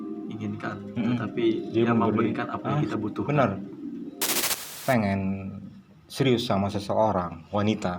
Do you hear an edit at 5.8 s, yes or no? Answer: no